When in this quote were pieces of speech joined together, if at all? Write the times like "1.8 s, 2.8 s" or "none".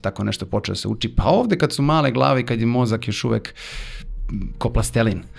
none